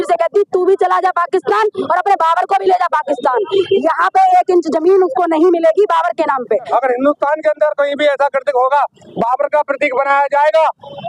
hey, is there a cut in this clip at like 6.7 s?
yes; 1 cut; at 6.7 s

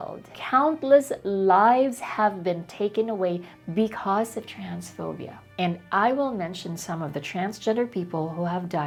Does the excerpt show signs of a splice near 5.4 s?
no; 0 cuts

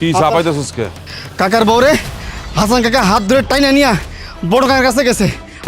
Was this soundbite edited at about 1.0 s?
yes; 1 cut; at 1.0 s

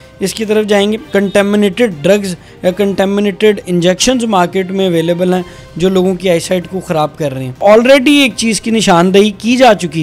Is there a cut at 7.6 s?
yes; 2 cuts; at 1.0 s, 7.6 s

